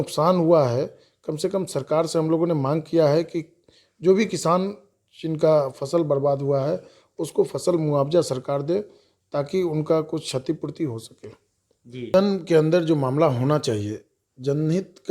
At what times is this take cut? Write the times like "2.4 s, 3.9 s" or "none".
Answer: 12.1 s

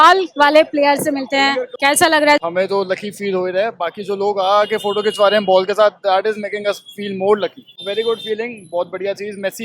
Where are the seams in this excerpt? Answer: 2.4 s, 7.8 s

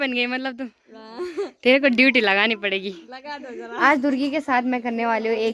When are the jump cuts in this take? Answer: 3.8 s

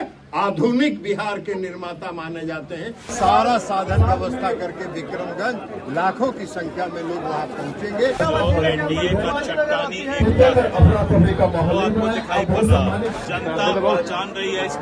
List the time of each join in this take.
3.1 s, 8.2 s, 13.1 s

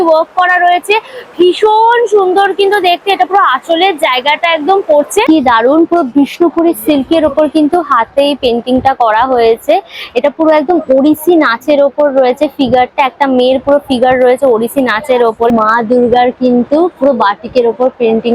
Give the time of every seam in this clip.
5.2 s, 15.5 s

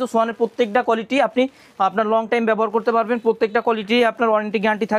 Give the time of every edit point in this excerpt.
none

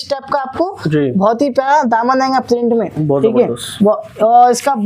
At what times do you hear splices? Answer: none

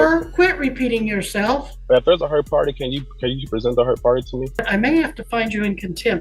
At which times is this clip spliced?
1.7 s, 4.6 s

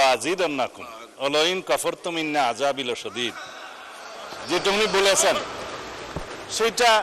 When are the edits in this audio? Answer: none

